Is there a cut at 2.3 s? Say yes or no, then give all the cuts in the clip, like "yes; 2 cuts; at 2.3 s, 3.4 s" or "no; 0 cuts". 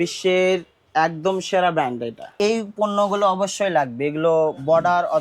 yes; 1 cut; at 2.3 s